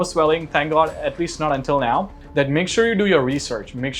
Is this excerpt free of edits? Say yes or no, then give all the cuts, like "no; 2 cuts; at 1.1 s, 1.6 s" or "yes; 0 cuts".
no; 1 cut; at 2.2 s